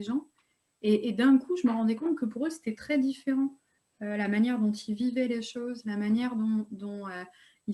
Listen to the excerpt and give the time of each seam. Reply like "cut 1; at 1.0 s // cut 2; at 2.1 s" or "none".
none